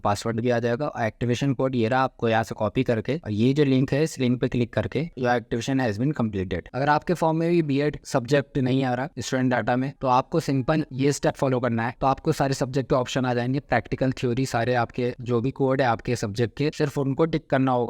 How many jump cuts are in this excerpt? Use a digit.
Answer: 3